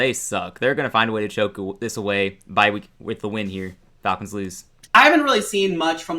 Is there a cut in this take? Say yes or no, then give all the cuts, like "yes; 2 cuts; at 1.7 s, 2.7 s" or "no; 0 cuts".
yes; 1 cut; at 4.9 s